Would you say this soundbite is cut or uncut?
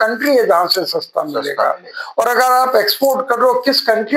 uncut